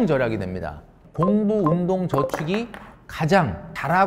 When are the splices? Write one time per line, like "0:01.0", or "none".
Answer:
0:01.0